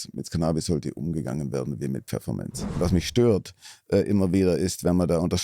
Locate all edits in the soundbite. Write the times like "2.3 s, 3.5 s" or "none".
2.8 s